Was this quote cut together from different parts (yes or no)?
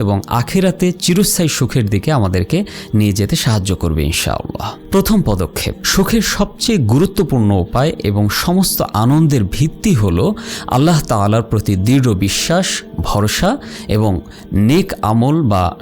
no